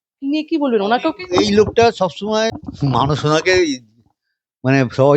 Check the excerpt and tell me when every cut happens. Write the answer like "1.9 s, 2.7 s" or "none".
2.5 s